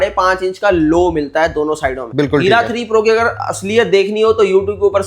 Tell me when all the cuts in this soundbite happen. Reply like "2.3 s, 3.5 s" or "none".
2.1 s